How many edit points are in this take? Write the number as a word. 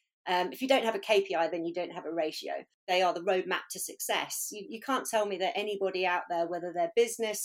one